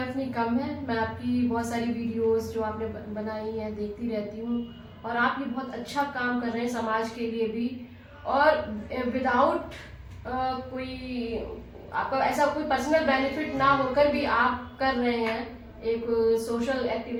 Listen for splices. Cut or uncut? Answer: uncut